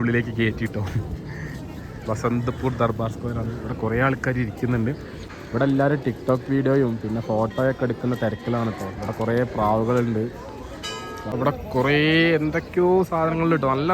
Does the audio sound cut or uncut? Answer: cut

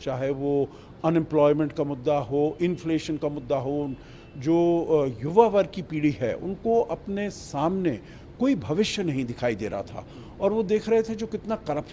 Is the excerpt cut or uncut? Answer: uncut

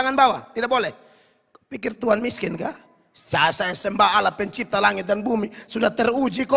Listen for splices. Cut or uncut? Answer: uncut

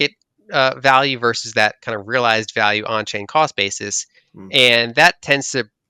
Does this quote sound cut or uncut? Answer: uncut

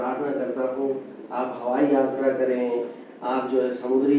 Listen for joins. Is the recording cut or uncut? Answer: uncut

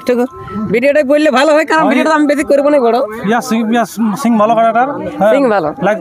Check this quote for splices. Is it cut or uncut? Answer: uncut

